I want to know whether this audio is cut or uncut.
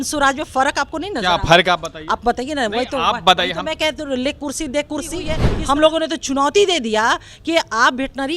cut